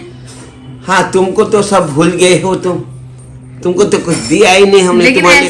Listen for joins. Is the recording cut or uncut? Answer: uncut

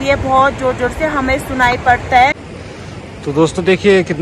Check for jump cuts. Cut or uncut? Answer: cut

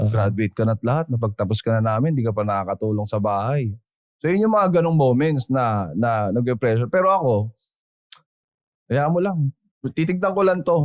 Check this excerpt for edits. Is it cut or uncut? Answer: uncut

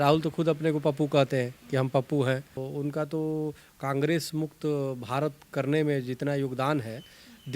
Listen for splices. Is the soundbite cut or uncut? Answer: cut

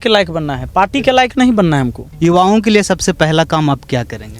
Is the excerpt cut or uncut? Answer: cut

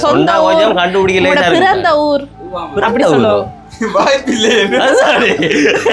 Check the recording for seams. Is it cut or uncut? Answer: uncut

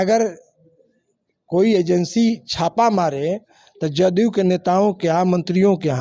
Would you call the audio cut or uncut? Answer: uncut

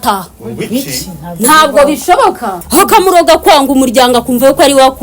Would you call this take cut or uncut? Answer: cut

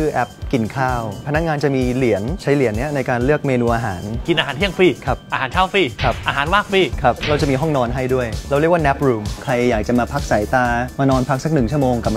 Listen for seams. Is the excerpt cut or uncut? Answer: cut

